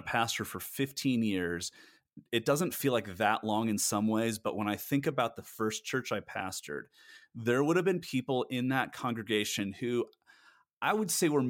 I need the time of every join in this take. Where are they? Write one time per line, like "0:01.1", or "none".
none